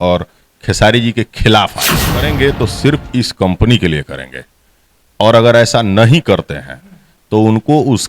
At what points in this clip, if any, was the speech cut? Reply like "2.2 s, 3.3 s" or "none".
2.3 s